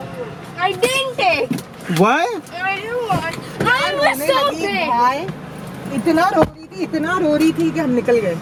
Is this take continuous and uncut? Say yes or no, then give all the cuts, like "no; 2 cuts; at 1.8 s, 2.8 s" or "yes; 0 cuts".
yes; 0 cuts